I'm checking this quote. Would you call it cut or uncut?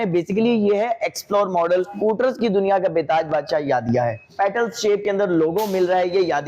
cut